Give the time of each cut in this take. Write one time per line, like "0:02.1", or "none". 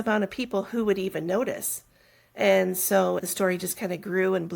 0:03.3